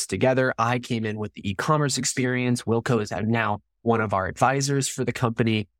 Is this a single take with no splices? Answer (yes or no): yes